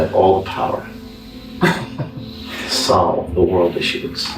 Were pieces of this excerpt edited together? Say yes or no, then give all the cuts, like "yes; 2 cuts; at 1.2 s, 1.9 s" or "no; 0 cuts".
no; 0 cuts